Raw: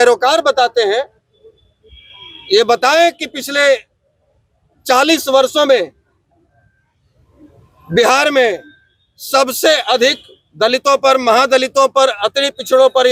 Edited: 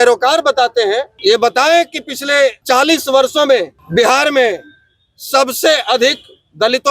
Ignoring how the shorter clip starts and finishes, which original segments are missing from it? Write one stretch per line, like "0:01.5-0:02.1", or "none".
0:01.1-0:02.4
0:03.9-0:04.8
0:06.0-0:07.8